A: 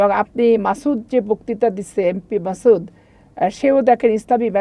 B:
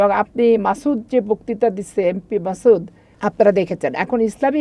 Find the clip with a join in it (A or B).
B